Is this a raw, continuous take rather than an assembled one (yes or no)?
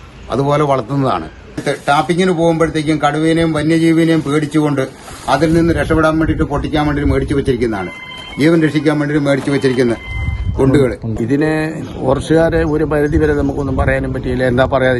no